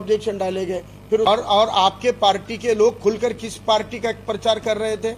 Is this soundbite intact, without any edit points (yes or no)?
no